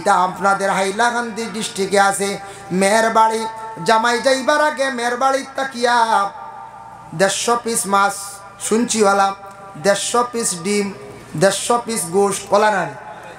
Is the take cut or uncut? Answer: uncut